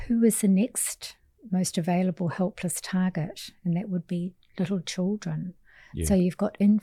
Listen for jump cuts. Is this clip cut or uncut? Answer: uncut